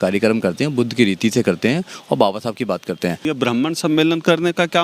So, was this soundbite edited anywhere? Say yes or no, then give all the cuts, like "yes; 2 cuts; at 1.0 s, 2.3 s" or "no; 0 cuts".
yes; 1 cut; at 3.3 s